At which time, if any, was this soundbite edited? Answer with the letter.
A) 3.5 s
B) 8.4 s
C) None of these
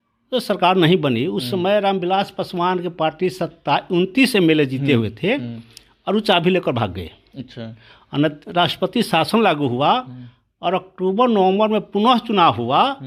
C